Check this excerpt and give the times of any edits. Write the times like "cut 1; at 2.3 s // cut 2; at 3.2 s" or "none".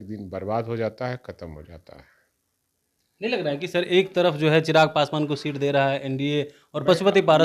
none